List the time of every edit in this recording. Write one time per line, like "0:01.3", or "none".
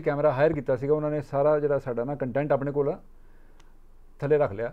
none